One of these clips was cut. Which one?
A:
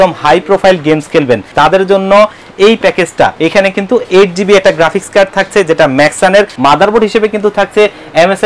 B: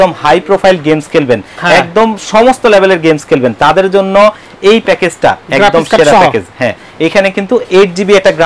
A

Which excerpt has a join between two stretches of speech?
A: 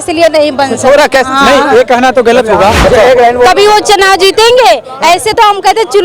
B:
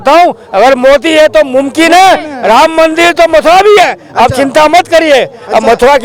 A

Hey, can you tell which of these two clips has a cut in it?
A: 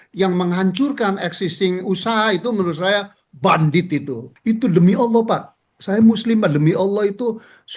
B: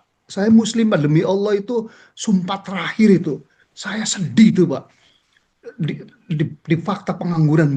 A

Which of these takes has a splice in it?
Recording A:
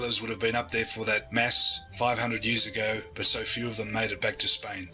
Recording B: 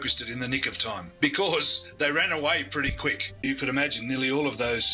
B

